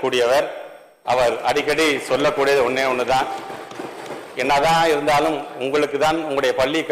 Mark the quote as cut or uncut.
uncut